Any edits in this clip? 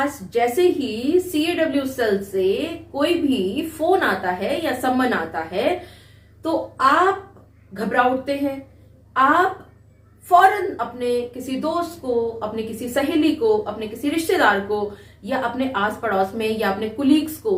no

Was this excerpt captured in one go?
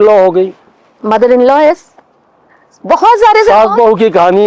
yes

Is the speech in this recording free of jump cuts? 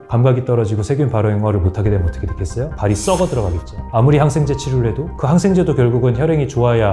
no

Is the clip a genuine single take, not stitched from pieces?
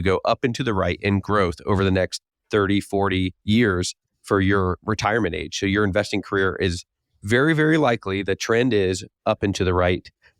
yes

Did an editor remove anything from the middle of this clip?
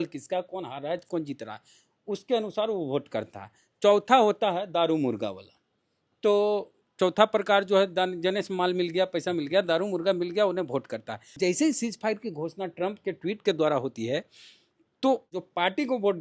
yes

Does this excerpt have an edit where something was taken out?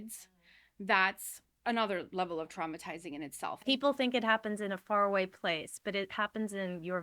yes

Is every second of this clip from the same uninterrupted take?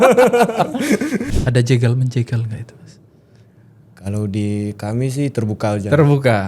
no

